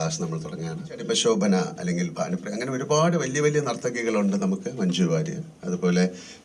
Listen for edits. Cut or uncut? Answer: cut